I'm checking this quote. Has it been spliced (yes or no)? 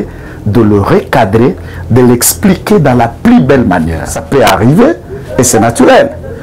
yes